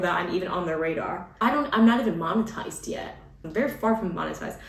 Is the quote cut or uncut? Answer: cut